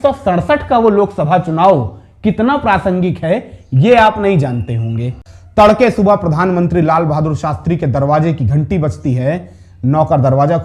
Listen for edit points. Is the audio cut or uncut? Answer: cut